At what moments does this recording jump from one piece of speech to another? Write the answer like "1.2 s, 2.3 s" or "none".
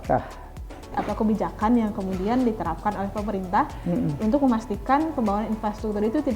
1.0 s